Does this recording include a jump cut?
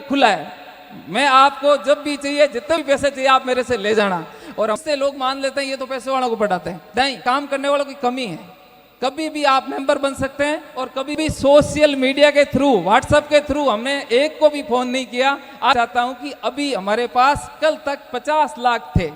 yes; 4 cuts; at 4.8 s, 7.2 s, 11.2 s, 15.7 s

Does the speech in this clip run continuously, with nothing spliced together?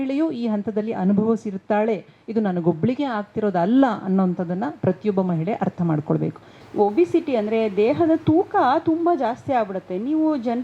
no; 1 cut; at 6.6 s

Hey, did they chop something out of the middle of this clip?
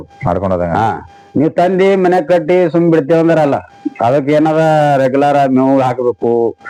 no; 0 cuts

